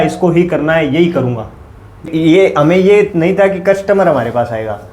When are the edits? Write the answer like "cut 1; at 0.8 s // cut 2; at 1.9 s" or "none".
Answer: cut 1; at 2.1 s